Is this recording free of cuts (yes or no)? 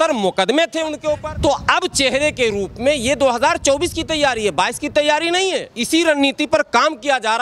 no